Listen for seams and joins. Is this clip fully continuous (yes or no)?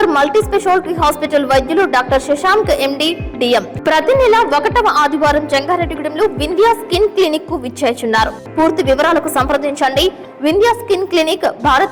no